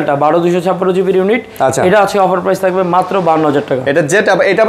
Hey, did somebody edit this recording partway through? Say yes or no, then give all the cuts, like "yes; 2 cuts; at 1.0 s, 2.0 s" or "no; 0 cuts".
no; 0 cuts